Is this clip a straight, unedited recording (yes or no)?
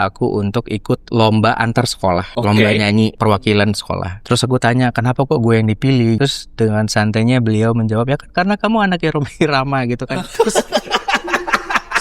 no